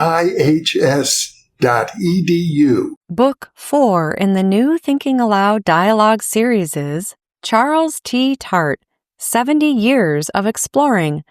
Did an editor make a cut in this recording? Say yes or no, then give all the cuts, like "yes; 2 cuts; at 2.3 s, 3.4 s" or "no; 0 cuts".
yes; 1 cut; at 3.0 s